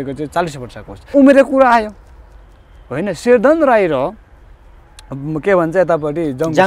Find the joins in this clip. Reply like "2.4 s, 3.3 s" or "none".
1.1 s

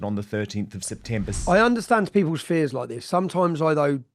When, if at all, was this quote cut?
1.4 s

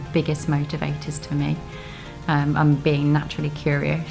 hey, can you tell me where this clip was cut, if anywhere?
none

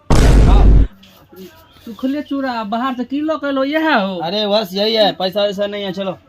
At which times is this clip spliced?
0.9 s

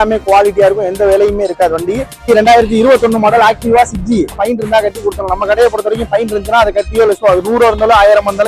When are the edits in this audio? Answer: 2.3 s, 4.4 s

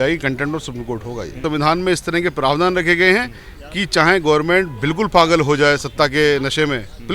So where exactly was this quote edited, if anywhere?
1.4 s

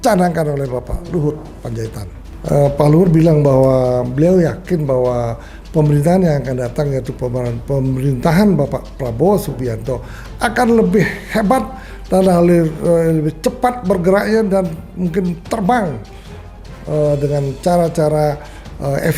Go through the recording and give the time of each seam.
2.3 s

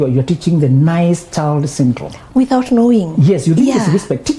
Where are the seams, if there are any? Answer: 2.1 s

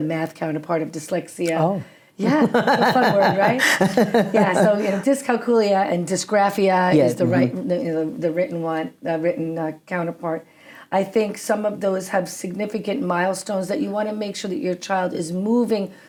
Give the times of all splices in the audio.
none

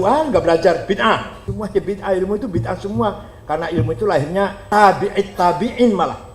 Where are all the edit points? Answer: 1.4 s, 4.6 s

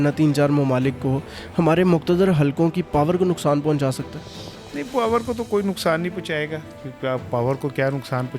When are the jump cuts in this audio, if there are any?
none

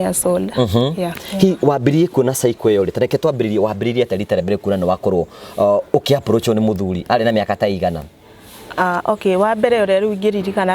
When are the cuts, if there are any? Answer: 1.2 s

